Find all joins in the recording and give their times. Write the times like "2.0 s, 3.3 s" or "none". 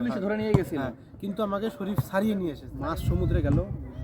2.7 s